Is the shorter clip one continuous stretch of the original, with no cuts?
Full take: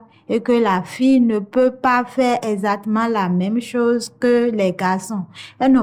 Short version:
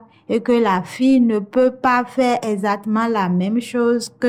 yes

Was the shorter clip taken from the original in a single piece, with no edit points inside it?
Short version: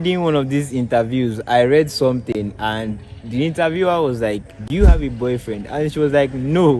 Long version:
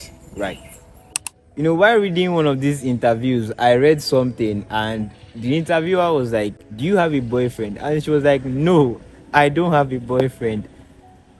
yes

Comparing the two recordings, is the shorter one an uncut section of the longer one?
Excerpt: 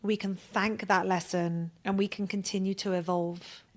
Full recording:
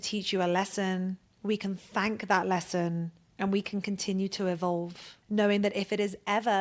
no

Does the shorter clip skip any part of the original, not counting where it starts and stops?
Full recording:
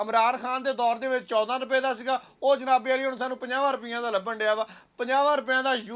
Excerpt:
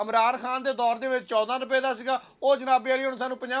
no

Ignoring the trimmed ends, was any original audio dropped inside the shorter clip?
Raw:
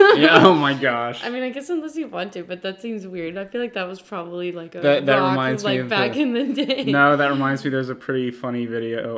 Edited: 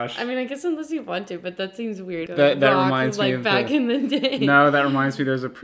yes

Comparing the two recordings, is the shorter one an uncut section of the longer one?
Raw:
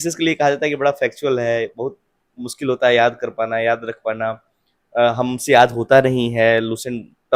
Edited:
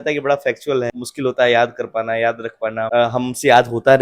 no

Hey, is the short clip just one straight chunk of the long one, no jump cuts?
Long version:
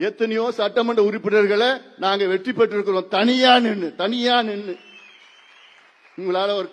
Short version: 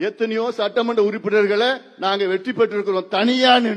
yes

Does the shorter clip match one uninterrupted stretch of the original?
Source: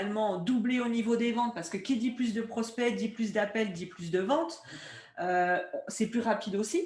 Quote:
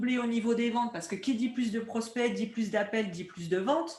yes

